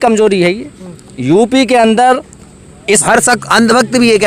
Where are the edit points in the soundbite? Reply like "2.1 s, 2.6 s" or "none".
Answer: 2.9 s